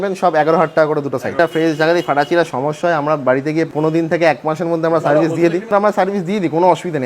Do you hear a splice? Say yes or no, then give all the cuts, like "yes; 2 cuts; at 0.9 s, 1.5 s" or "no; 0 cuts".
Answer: yes; 3 cuts; at 1.3 s, 3.7 s, 5.7 s